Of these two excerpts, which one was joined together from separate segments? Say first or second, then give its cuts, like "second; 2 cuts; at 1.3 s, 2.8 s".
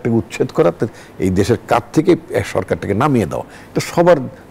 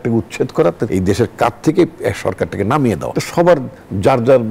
second; 2 cuts; at 0.8 s, 3.1 s